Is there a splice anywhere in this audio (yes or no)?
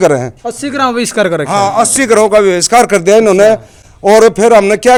no